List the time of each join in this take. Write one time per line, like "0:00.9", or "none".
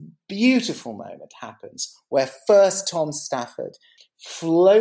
0:03.9